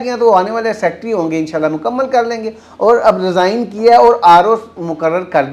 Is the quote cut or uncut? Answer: uncut